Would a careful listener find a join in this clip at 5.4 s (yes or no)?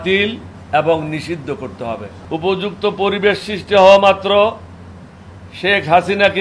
no